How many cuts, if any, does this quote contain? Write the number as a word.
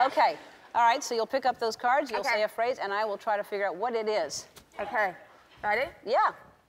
one